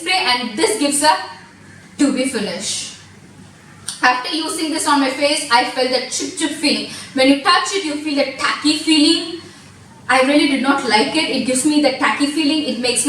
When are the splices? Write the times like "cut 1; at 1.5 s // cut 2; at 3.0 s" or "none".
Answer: none